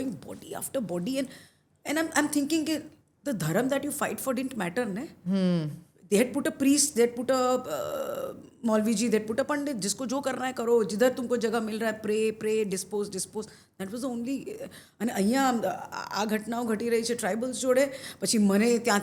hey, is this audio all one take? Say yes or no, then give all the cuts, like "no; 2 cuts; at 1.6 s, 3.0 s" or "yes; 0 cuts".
yes; 0 cuts